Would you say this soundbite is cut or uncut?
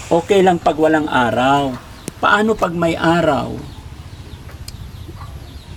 uncut